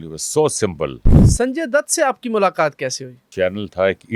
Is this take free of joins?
no; 2 cuts; at 1.1 s, 3.3 s

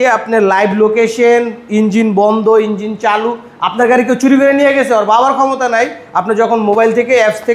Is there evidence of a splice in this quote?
no; 0 cuts

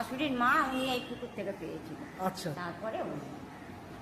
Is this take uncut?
no; 1 cut; at 2.8 s

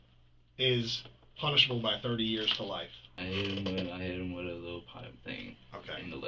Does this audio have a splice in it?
yes; 1 cut; at 3.1 s

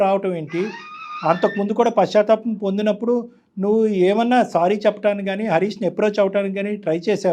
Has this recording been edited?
no; 0 cuts

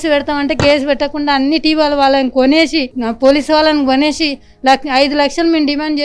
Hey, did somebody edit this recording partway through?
no; 0 cuts

